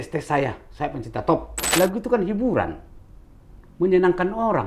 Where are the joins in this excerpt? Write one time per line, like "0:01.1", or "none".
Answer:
0:01.6